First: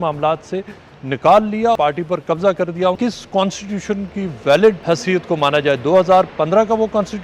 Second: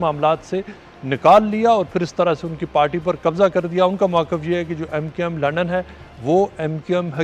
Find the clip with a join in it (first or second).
first